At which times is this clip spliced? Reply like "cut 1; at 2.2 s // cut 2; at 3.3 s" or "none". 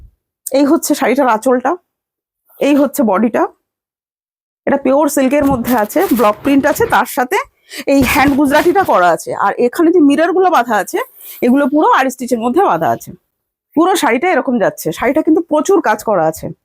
none